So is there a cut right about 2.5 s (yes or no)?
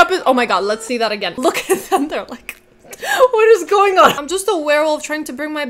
no